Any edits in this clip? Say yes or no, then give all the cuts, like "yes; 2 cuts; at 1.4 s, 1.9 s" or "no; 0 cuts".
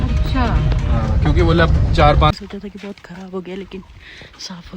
yes; 1 cut; at 2.3 s